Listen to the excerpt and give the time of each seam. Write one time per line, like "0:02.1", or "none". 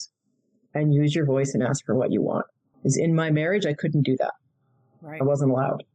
0:02.6

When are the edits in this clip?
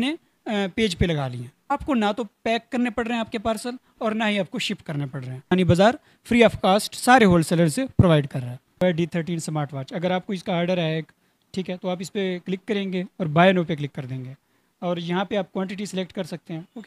0:01.6
0:05.5
0:08.8

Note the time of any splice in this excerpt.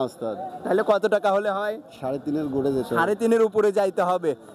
none

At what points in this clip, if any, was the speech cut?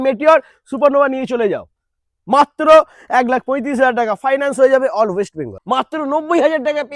0:05.5

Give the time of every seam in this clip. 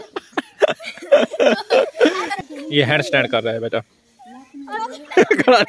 0:02.3

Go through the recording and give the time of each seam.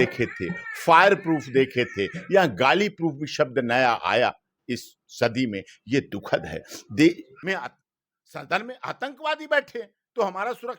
0:07.3

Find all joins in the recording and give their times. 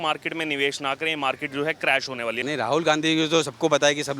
0:02.4

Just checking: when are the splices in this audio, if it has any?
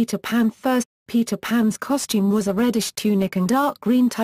none

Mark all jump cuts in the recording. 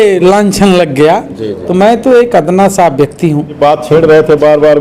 0:03.6

